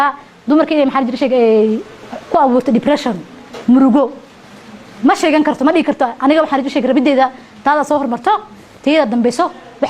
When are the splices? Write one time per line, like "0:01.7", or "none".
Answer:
none